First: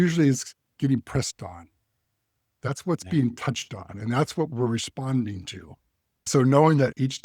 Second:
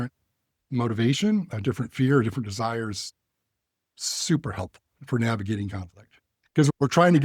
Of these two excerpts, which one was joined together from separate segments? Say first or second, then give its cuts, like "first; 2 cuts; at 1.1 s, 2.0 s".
first; 1 cut; at 6.2 s